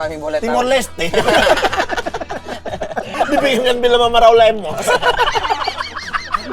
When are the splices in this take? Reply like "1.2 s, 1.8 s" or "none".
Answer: 3.1 s